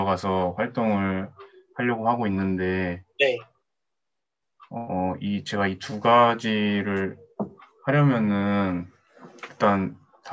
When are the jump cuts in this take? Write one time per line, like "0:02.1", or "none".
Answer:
none